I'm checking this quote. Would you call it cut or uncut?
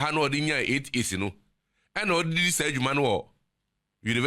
uncut